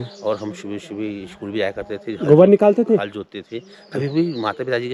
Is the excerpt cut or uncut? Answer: uncut